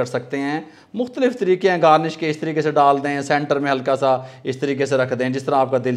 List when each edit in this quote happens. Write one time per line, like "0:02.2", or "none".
none